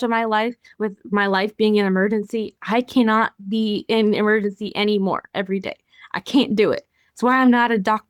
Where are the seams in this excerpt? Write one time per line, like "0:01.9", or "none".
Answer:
none